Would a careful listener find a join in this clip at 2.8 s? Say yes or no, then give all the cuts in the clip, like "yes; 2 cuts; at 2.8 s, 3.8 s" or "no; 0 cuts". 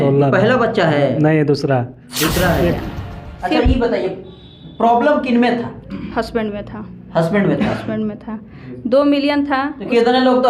yes; 1 cut; at 2.8 s